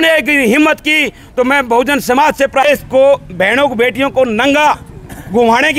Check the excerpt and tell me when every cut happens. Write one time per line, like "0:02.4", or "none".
0:02.6